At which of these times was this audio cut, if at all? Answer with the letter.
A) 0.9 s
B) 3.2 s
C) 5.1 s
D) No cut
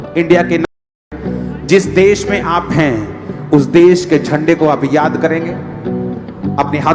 A